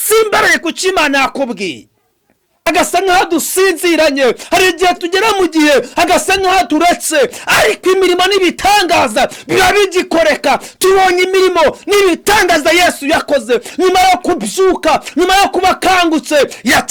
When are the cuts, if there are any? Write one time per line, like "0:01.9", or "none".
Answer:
0:02.7